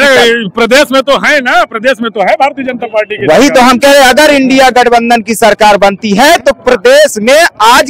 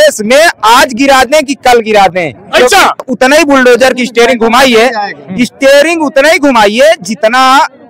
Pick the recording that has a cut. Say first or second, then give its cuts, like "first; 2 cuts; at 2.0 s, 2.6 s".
second; 1 cut; at 3.1 s